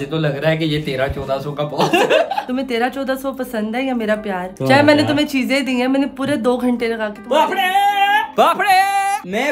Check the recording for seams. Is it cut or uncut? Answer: cut